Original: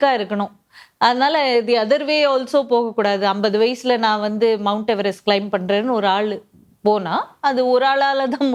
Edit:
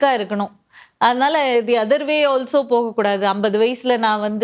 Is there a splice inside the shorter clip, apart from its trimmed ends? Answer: no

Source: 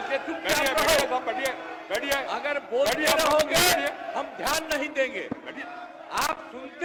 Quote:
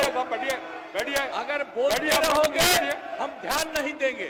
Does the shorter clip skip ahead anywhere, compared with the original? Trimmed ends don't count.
no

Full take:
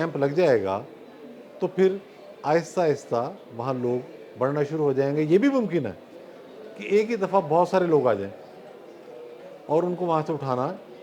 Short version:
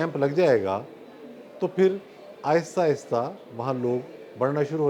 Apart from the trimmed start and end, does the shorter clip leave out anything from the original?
no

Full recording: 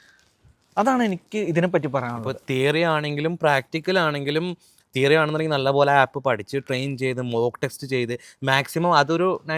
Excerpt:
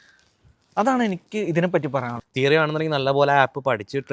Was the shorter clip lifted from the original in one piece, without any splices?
no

